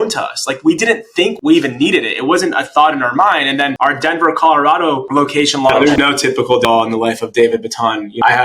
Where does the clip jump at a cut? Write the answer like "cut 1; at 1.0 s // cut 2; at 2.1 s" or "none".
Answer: cut 1; at 1.4 s // cut 2; at 5.8 s